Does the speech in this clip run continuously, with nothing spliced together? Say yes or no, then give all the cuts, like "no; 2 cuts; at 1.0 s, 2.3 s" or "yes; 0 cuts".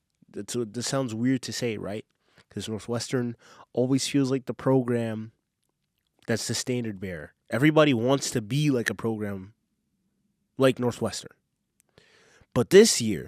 no; 1 cut; at 7.3 s